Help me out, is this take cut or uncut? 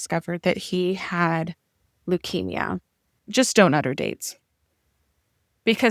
cut